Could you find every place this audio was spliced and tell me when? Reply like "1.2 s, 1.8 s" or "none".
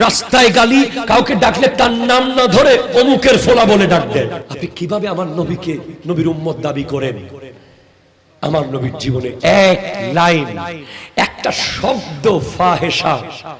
4.5 s